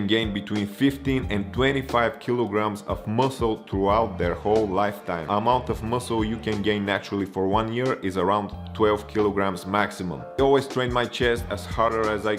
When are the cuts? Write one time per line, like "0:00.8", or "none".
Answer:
0:05.3
0:10.4